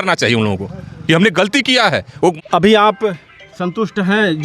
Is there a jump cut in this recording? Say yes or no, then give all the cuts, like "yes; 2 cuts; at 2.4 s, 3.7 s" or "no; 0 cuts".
yes; 1 cut; at 2.4 s